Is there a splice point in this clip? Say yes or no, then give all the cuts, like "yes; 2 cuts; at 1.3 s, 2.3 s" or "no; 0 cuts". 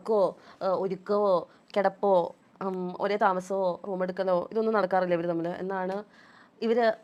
no; 0 cuts